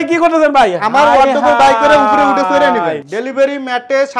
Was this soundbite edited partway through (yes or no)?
yes